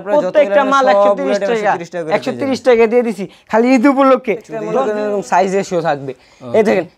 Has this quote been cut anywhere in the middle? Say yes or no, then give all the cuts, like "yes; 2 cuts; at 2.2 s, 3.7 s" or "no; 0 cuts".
yes; 1 cut; at 4.8 s